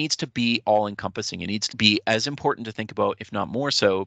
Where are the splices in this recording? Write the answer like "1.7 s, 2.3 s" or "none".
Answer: 1.6 s